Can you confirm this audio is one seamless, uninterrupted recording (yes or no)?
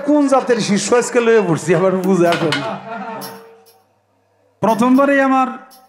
yes